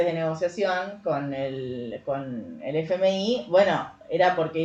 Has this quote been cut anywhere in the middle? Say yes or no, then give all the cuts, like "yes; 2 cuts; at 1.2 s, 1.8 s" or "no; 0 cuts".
no; 0 cuts